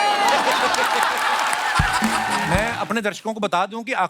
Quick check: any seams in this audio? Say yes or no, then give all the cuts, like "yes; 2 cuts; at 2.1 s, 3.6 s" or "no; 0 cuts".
yes; 1 cut; at 2.5 s